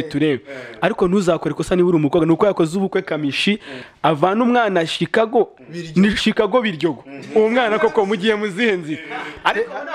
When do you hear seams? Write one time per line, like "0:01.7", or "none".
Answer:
0:03.8